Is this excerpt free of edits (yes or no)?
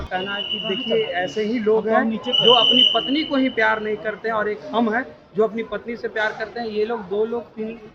yes